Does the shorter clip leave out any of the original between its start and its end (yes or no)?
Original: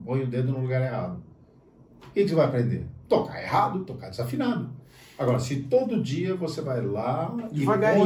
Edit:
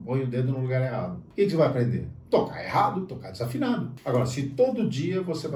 yes